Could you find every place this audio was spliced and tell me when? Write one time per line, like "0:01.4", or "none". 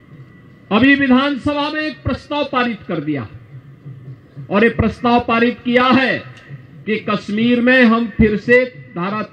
none